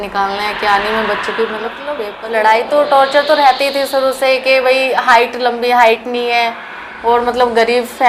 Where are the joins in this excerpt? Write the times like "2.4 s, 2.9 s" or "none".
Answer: 2.1 s